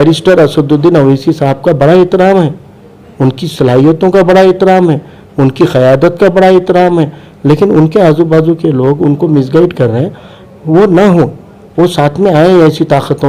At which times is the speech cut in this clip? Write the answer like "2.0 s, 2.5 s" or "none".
none

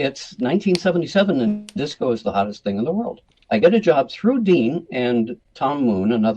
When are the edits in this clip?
3.4 s, 5.4 s

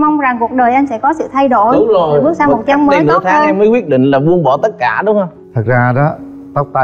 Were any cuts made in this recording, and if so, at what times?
none

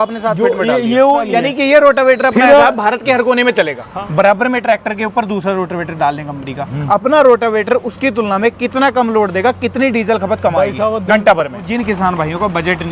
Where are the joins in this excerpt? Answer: 1.3 s, 3.8 s, 11.6 s

